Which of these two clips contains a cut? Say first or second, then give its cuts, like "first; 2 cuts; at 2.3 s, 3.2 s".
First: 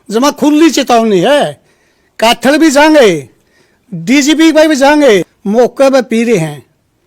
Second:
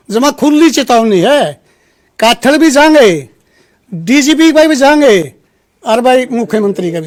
first; 1 cut; at 5.4 s